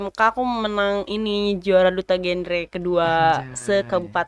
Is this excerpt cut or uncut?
uncut